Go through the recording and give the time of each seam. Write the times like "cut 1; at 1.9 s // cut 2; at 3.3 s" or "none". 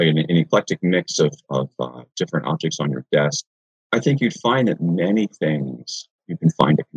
cut 1; at 3.5 s

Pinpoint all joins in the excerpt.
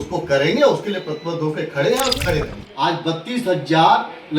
cut 1; at 2.6 s

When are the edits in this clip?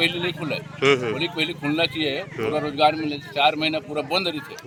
none

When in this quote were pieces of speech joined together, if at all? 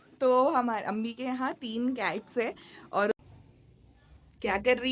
cut 1; at 3.1 s

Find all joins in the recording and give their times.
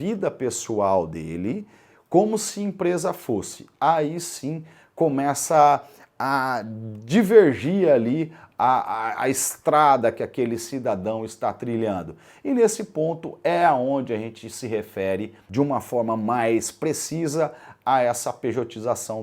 cut 1; at 15.4 s

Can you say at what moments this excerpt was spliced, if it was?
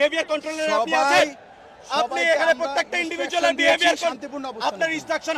none

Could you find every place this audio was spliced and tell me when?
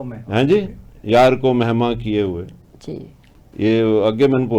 none

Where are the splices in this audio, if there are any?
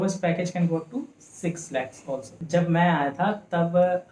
cut 1; at 2.3 s

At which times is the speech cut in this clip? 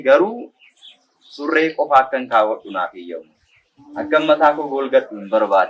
none

